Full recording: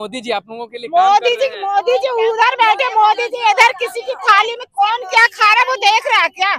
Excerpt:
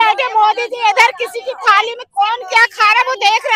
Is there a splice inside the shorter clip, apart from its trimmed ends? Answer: no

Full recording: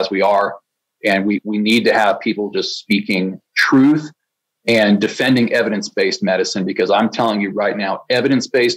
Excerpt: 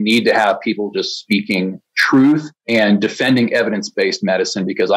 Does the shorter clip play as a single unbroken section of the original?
no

